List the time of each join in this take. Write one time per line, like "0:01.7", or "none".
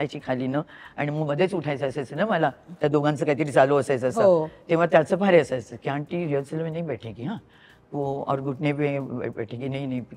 none